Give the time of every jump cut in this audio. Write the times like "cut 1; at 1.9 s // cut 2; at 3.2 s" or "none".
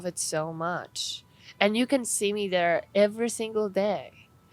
none